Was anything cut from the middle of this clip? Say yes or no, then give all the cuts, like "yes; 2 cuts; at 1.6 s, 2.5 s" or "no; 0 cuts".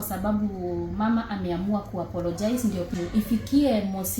yes; 1 cut; at 2.9 s